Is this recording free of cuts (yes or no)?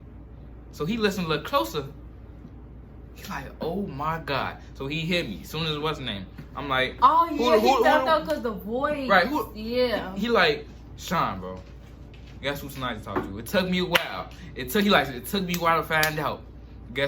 yes